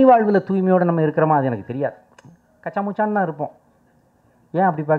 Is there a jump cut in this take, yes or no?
no